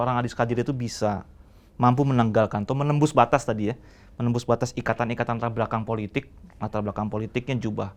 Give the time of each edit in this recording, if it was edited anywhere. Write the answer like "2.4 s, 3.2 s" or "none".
none